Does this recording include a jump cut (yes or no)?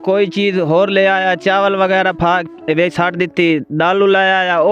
no